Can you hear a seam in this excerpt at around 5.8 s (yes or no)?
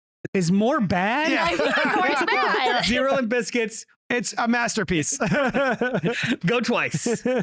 no